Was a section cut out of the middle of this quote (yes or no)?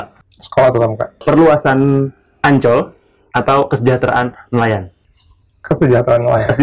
yes